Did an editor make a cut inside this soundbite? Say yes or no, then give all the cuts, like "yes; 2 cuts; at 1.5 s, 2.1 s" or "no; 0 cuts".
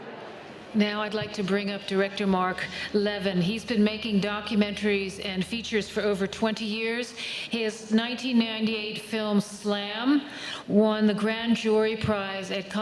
yes; 1 cut; at 8.2 s